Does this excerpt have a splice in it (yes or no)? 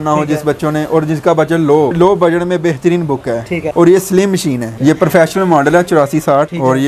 yes